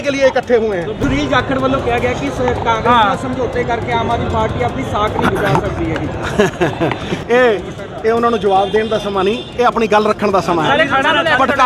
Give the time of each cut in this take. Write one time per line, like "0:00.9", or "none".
0:01.0